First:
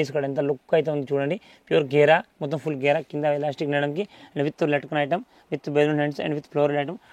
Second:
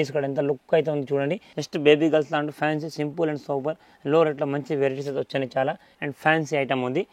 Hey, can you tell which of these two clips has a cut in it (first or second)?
second